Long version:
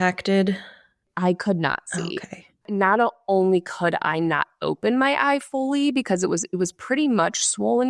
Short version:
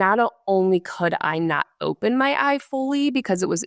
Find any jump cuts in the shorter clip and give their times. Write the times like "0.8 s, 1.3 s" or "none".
none